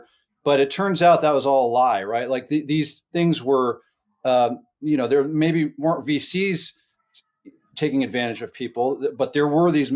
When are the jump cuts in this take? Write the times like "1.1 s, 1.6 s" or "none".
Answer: none